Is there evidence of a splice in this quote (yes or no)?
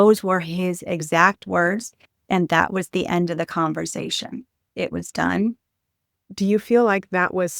yes